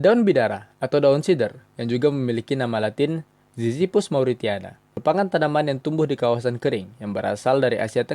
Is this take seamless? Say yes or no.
no